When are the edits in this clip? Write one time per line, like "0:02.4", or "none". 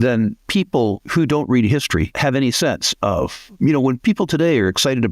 0:01.0
0:02.2
0:03.8